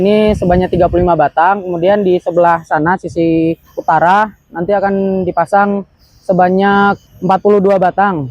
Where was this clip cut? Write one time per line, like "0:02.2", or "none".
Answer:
0:03.7
0:07.1